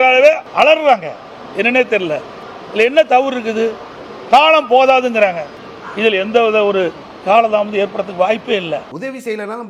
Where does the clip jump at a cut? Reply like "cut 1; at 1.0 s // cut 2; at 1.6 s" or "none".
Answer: none